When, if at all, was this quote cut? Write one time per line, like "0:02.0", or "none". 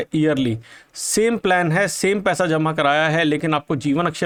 none